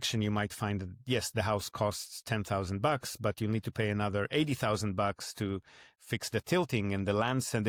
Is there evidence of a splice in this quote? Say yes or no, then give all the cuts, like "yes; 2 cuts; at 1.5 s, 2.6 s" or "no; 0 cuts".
no; 0 cuts